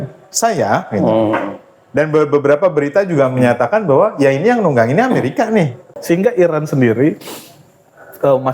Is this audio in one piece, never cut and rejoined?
no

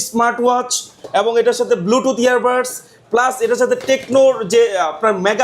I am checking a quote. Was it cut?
no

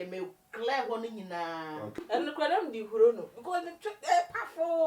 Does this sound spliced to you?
yes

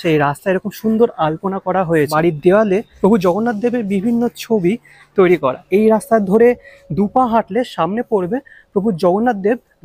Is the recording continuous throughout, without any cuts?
no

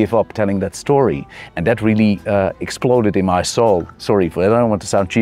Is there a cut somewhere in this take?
no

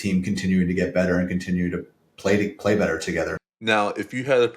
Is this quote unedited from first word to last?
no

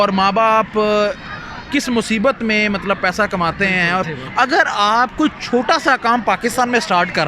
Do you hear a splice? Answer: yes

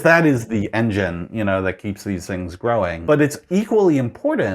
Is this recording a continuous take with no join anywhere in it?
no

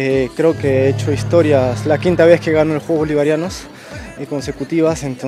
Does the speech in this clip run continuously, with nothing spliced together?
yes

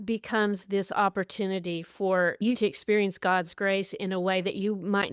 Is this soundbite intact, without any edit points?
yes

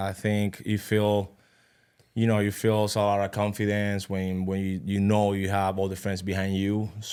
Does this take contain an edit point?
no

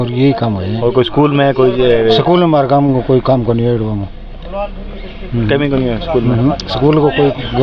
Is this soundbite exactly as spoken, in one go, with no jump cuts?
yes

